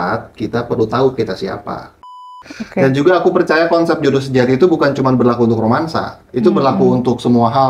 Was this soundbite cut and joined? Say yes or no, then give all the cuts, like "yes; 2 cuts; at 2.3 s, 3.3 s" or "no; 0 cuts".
yes; 1 cut; at 2.1 s